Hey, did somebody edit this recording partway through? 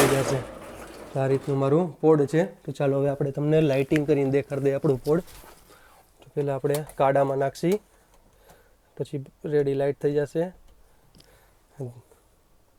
no; 0 cuts

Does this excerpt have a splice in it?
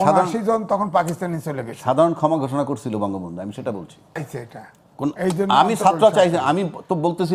yes; 1 cut; at 4.2 s

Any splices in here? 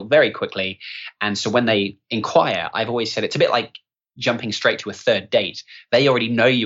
no; 0 cuts

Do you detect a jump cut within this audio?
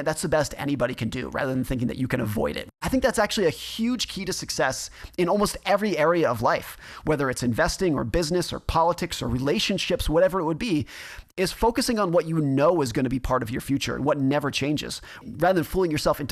yes; 2 cuts; at 2.8 s, 15.2 s

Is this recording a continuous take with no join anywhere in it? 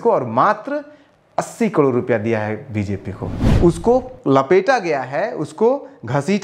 no; 1 cut; at 3.5 s

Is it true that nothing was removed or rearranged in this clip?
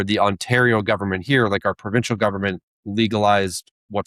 yes; 0 cuts

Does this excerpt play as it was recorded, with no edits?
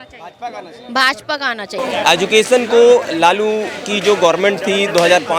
no; 1 cut; at 1.8 s

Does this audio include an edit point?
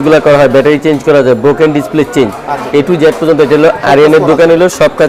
no; 0 cuts

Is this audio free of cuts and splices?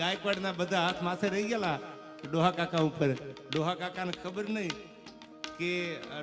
yes; 0 cuts

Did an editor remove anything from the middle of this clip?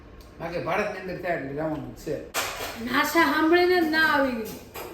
yes; 1 cut; at 2.4 s

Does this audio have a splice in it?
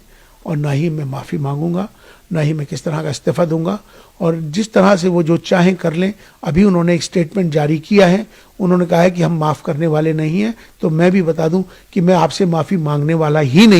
no; 0 cuts

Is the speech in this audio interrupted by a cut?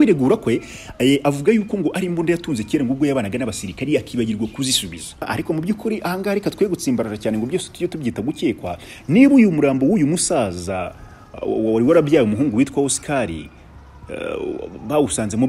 yes; 1 cut; at 5.3 s

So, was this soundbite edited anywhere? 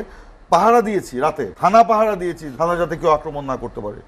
yes; 2 cuts; at 1.5 s, 2.4 s

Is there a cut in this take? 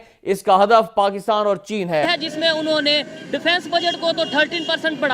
yes; 1 cut; at 2.1 s

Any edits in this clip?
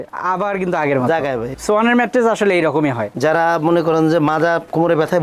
yes; 2 cuts; at 1.5 s, 3.1 s

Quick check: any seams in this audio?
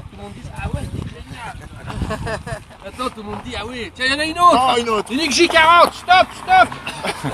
no; 0 cuts

